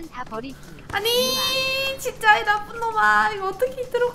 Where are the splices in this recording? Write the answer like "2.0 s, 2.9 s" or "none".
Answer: none